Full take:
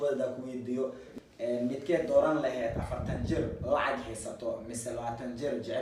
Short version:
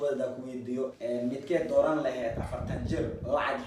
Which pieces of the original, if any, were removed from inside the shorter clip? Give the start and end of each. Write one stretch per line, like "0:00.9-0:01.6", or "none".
0:01.0-0:01.3